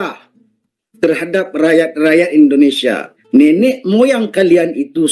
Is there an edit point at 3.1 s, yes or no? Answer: yes